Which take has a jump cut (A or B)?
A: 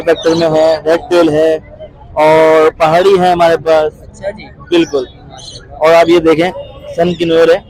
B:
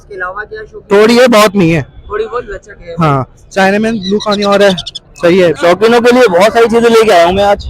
B